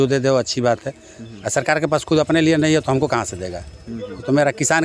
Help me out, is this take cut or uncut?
uncut